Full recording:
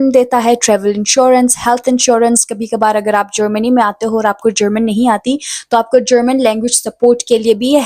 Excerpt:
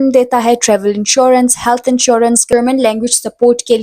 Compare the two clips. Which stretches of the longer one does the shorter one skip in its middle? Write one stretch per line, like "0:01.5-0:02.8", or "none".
0:02.5-0:06.1

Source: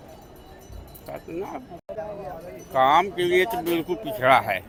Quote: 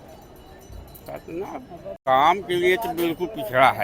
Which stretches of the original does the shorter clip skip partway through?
0:01.9-0:02.6

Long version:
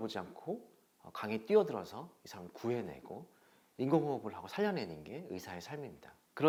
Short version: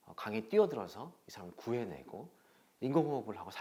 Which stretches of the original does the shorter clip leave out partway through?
none

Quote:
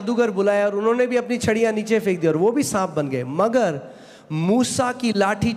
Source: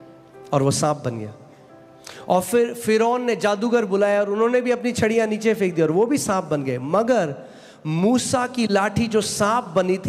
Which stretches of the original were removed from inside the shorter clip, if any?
none

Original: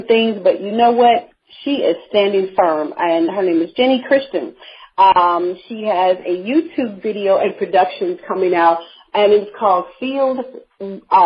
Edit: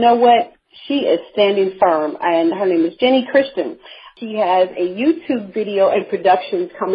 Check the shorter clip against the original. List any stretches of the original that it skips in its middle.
0:04.8-0:05.6

